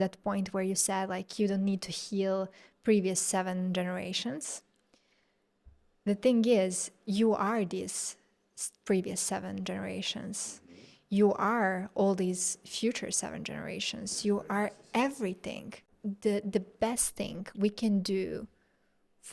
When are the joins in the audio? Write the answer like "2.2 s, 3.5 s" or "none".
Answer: 15.8 s